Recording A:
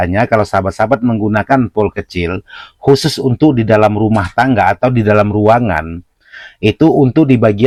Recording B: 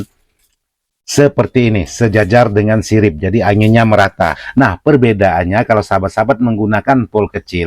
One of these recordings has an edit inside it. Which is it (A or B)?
B